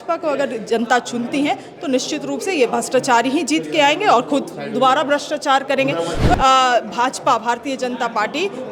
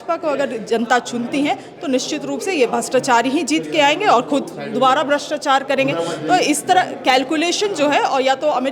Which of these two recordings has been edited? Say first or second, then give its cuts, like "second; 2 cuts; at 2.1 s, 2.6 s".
first; 1 cut; at 6.3 s